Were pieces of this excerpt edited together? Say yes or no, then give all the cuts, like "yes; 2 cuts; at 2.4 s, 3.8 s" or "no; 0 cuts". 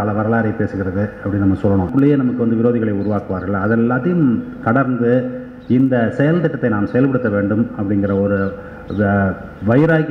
yes; 1 cut; at 1.9 s